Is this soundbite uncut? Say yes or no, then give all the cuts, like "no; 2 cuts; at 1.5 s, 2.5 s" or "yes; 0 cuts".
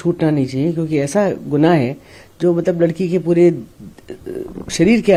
yes; 0 cuts